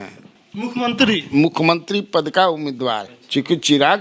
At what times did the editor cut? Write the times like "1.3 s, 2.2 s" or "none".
3.1 s